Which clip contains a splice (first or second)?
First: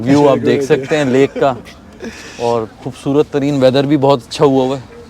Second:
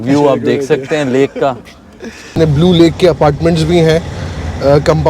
second